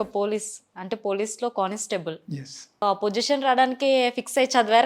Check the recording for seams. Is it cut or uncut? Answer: cut